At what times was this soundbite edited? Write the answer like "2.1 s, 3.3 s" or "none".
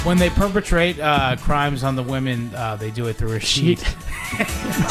none